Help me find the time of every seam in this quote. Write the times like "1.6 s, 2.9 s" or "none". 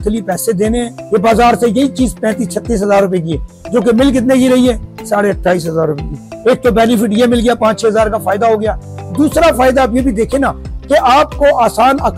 1.0 s